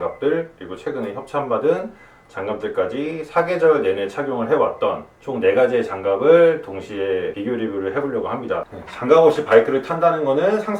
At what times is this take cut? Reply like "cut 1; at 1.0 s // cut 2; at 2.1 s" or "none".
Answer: cut 1; at 8.7 s